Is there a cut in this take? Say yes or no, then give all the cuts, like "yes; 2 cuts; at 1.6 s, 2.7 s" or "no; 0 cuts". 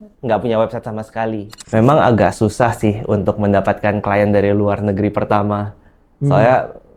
yes; 1 cut; at 1.5 s